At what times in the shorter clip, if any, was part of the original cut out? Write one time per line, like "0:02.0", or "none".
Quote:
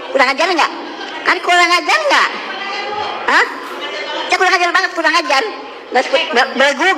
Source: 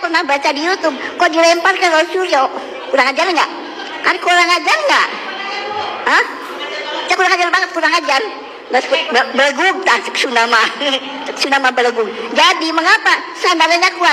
none